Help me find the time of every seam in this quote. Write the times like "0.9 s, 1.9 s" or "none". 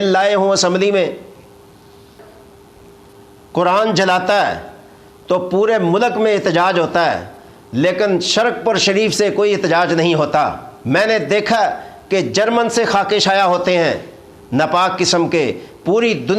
2.2 s, 10.7 s